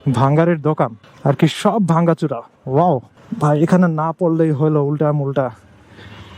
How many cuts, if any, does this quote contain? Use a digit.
2